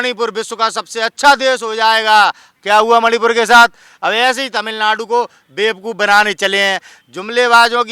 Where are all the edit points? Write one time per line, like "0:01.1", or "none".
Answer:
none